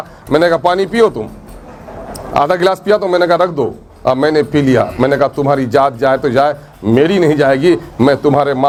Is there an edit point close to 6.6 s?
no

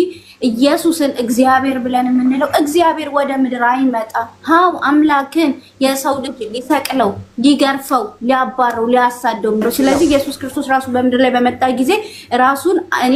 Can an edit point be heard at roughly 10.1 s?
yes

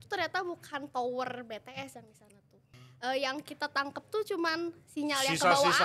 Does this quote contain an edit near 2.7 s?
yes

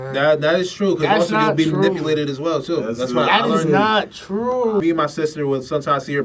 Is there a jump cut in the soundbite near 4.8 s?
yes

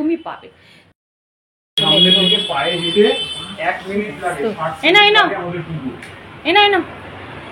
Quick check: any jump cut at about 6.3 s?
no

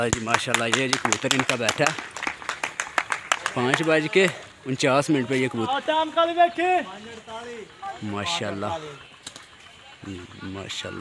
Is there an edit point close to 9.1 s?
no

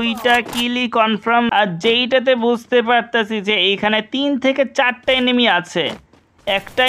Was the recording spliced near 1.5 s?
yes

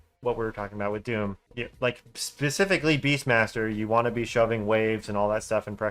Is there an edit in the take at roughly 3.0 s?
no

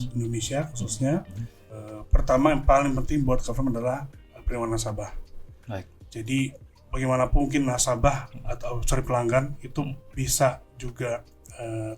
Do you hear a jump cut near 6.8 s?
no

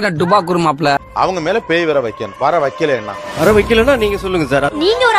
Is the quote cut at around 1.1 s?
yes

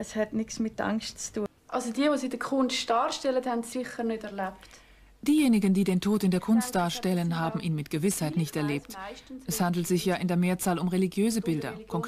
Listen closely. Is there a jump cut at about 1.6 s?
yes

